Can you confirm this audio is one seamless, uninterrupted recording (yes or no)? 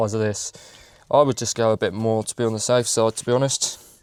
yes